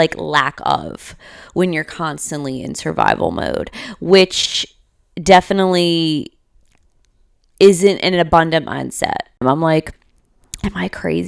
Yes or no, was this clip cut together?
yes